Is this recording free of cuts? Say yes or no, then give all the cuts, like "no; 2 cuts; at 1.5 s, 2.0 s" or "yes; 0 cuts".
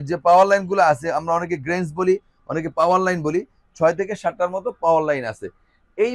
yes; 0 cuts